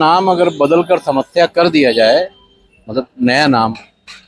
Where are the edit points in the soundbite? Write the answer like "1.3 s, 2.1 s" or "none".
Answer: none